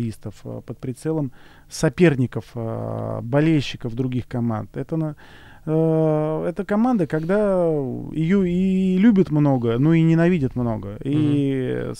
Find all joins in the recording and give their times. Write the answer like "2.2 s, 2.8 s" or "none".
none